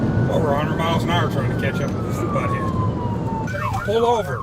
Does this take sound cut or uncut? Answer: cut